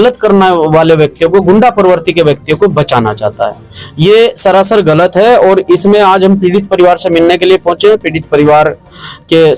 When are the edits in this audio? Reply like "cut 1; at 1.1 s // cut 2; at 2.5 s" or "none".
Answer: none